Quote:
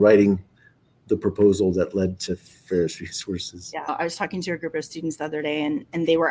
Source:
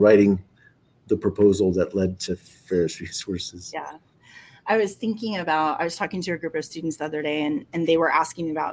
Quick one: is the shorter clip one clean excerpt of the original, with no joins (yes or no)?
no